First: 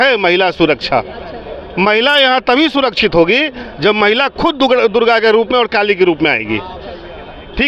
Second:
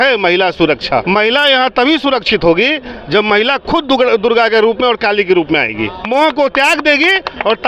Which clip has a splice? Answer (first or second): second